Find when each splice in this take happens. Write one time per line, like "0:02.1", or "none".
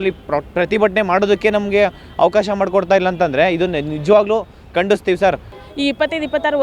0:05.5